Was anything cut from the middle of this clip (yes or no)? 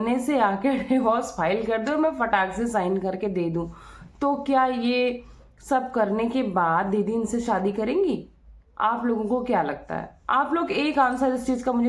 no